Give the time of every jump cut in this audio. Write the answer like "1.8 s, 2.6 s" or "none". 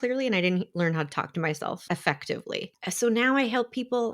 1.8 s, 2.7 s